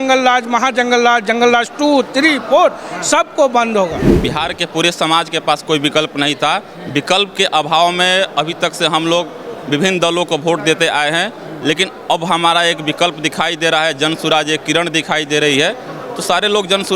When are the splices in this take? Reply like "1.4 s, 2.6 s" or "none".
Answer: 4.0 s